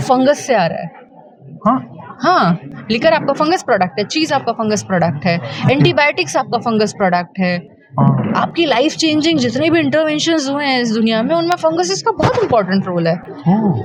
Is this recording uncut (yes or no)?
yes